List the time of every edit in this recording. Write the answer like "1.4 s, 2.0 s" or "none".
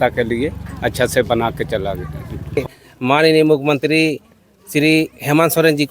2.6 s